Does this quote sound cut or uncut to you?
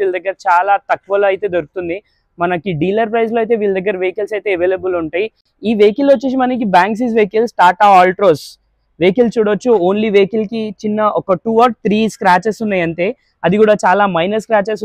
uncut